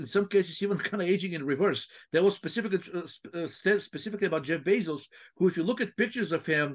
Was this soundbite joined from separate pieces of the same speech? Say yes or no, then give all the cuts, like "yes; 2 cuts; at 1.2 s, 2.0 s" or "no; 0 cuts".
no; 0 cuts